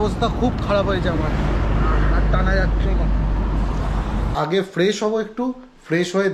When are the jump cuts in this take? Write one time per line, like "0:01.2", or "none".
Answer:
0:04.3